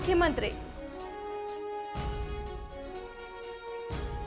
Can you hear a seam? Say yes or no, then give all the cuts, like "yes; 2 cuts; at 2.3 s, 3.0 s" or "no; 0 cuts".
no; 0 cuts